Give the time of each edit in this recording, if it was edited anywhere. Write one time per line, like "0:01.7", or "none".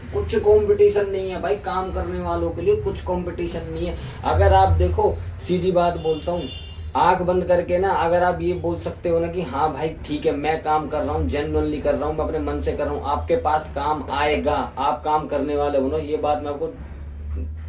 none